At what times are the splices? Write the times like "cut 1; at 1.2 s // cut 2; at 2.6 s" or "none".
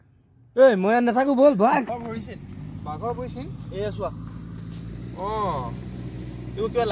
cut 1; at 1.9 s

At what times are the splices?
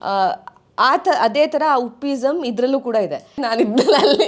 cut 1; at 3.4 s

